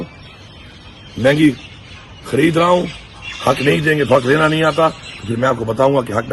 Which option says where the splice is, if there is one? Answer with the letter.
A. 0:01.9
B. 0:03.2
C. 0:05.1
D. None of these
B